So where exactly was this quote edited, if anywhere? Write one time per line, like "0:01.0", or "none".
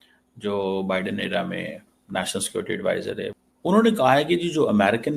0:03.3

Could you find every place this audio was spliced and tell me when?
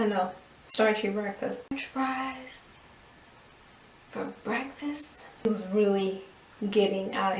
0:01.8
0:05.5

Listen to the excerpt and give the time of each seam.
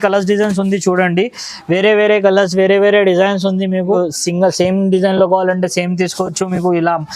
0:04.0

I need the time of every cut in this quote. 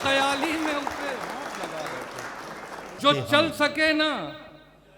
0:03.0

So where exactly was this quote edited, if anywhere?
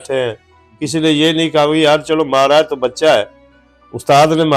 none

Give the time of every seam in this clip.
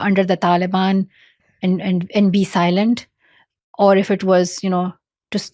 none

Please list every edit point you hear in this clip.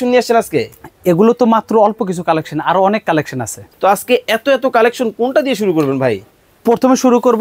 0:03.6

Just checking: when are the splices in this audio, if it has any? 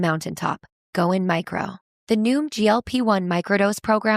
none

